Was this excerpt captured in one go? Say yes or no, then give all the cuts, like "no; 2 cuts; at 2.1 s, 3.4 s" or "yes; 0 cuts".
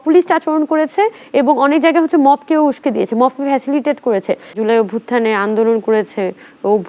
no; 1 cut; at 4.6 s